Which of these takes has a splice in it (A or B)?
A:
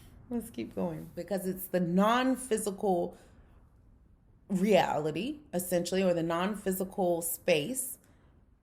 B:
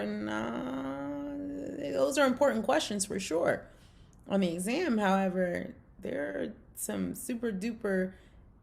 A